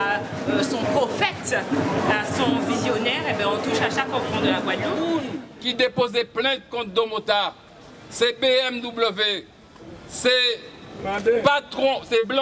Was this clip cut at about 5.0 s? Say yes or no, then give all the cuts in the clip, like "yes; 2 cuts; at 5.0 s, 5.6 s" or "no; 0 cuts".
yes; 1 cut; at 5.0 s